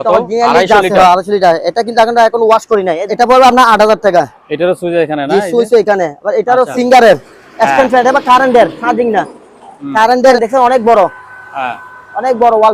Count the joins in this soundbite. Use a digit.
3